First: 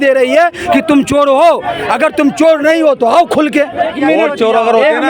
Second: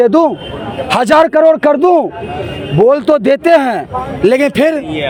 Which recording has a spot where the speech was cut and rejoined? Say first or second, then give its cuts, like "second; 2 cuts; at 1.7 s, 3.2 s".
first; 1 cut; at 3.9 s